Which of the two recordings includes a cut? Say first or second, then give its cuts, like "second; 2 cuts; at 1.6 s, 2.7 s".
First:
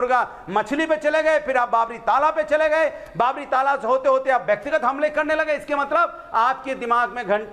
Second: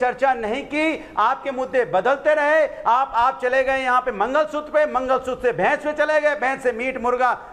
first; 1 cut; at 1.7 s